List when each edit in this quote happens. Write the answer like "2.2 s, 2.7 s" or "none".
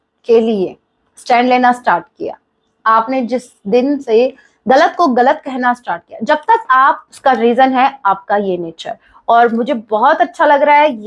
7.1 s